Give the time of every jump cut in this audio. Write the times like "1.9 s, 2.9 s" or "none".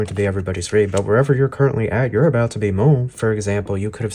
3.1 s